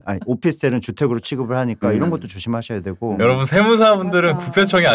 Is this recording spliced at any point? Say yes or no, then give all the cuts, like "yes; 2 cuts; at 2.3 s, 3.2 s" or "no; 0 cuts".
no; 0 cuts